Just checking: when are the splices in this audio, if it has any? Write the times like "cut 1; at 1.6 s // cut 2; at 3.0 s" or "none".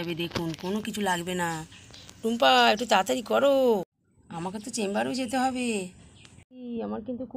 none